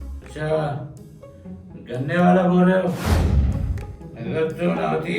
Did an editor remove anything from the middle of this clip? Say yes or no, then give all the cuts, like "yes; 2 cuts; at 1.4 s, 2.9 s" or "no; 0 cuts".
yes; 1 cut; at 3.0 s